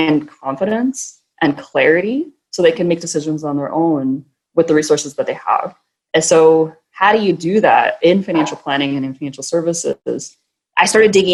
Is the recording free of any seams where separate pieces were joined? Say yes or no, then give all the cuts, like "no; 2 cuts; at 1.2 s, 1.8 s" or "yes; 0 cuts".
yes; 0 cuts